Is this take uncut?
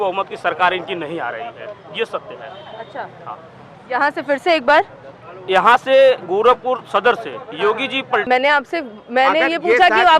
no; 1 cut; at 8.2 s

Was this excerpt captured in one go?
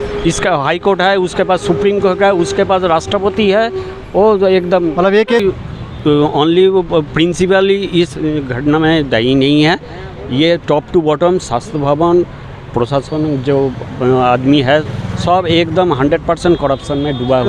no; 1 cut; at 5.4 s

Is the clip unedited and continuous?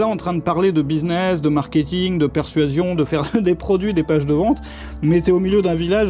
yes; 0 cuts

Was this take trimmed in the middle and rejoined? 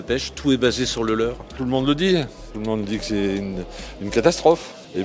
yes; 1 cut; at 1.5 s

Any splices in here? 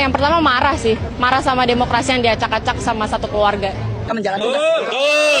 yes; 1 cut; at 4.1 s

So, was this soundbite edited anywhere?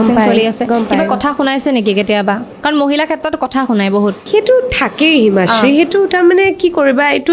no; 0 cuts

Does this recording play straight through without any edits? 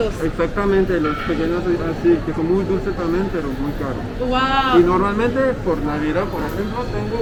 yes; 0 cuts

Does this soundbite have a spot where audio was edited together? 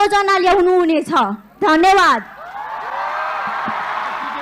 no; 0 cuts

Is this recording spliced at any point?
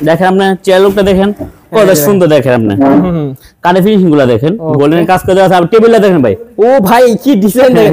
no; 0 cuts

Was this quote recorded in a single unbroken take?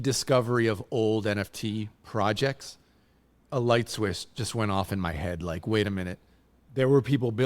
no; 1 cut; at 3.4 s

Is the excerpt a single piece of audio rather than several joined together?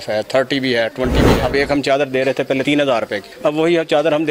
no; 2 cuts; at 1.3 s, 2.7 s

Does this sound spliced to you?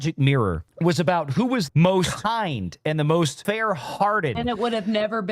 yes; 3 cuts; at 1.7 s, 3.4 s, 4.4 s

